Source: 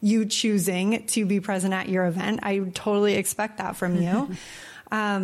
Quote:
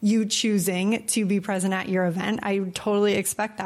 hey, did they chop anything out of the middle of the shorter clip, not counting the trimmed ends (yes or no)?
no